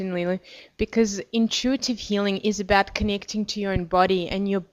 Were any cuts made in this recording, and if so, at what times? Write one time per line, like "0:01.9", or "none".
none